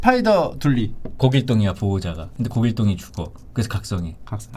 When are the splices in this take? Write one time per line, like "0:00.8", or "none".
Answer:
0:01.0